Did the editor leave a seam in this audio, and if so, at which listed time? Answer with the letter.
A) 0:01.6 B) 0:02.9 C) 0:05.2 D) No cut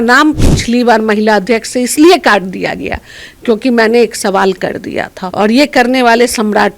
C